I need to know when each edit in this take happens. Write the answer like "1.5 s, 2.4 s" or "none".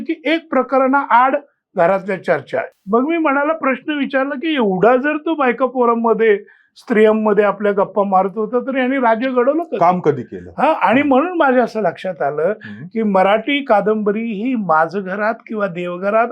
2.7 s